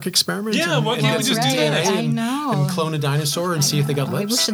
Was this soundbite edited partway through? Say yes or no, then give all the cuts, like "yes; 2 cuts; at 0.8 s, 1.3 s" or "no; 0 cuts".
no; 0 cuts